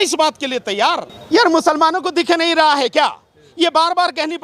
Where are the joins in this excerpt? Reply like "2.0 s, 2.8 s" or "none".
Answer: 1.1 s